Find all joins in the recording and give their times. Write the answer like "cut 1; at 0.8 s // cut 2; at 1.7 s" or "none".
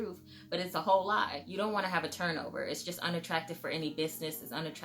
cut 1; at 1.4 s